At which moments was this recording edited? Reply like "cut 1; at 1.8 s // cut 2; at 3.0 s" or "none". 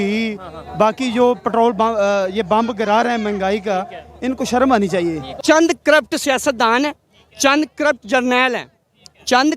cut 1; at 5.3 s